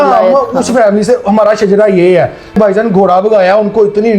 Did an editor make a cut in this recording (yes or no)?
yes